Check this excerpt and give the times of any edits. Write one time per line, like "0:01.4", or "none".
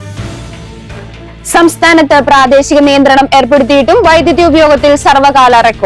0:01.1